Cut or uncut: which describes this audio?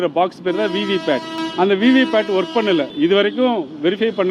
cut